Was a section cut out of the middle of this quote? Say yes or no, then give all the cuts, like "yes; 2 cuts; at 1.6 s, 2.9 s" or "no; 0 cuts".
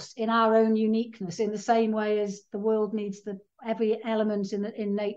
yes; 1 cut; at 3.4 s